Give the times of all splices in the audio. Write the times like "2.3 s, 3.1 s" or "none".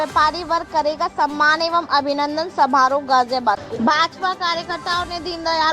3.7 s